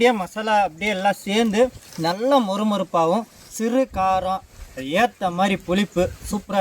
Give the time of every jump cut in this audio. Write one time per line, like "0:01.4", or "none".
0:01.9
0:04.5